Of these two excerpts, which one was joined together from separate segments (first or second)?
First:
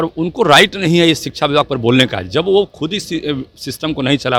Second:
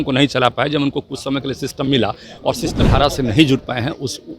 second